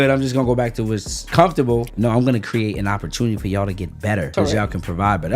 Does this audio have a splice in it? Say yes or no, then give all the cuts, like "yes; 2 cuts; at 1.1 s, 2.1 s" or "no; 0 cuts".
yes; 3 cuts; at 1.3 s, 1.9 s, 4.3 s